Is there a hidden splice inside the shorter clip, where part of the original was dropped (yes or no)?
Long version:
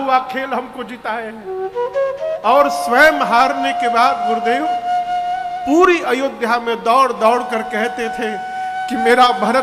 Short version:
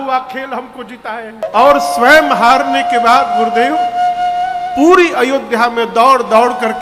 yes